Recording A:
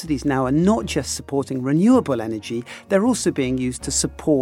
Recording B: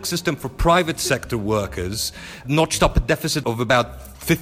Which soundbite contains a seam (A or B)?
B